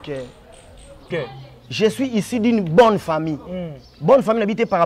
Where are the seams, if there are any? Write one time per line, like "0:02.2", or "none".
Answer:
0:01.1